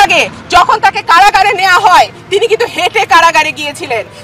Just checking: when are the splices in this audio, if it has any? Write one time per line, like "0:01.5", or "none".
none